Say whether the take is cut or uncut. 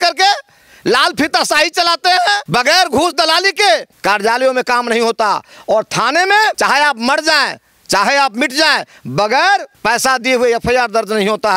cut